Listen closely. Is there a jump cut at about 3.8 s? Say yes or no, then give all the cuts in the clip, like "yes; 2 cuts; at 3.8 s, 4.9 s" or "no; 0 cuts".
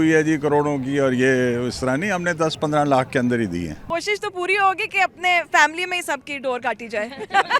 yes; 1 cut; at 3.8 s